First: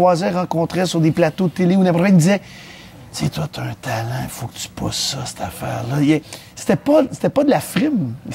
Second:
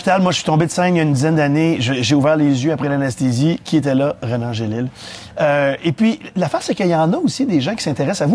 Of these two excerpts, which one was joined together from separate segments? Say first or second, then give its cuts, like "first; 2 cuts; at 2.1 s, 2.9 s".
first; 1 cut; at 2.0 s